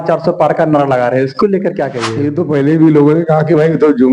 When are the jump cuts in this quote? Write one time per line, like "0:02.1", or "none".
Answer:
0:02.0